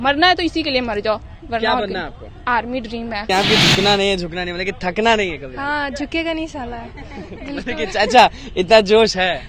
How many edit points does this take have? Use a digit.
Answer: 1